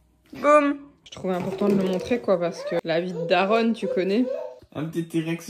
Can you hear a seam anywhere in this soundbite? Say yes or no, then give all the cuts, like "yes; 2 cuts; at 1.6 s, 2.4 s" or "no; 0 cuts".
yes; 2 cuts; at 0.9 s, 4.6 s